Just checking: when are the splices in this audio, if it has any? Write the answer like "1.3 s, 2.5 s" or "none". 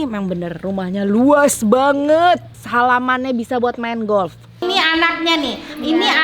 2.6 s, 4.6 s